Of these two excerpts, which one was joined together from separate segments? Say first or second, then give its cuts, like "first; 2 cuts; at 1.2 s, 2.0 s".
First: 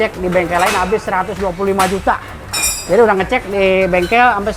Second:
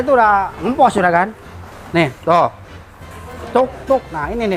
first; 1 cut; at 2.4 s